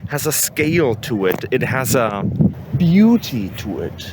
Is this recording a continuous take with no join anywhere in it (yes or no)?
no